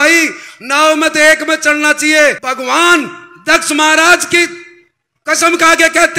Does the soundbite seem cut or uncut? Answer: cut